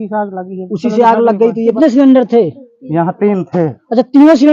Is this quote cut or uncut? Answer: cut